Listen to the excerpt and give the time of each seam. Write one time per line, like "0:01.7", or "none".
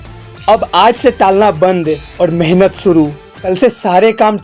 0:03.4

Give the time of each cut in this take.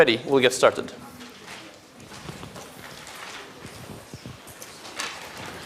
0:03.6

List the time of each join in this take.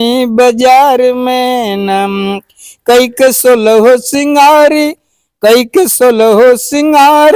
none

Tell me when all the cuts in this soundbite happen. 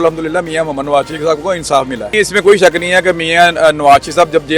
0:02.0

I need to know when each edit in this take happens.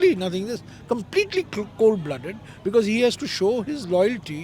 none

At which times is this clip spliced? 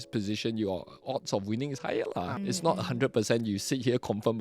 0:02.3

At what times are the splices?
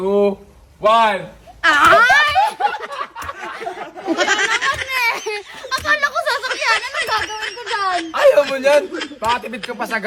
none

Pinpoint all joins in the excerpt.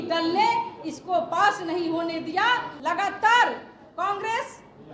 0:02.7

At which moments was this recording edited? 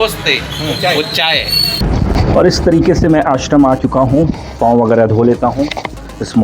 0:01.8

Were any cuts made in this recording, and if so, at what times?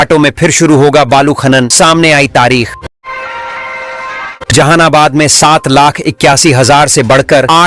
0:02.8

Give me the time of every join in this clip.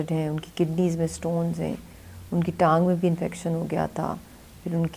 none

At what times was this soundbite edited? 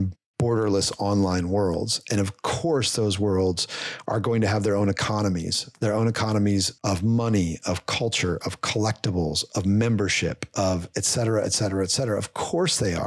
none

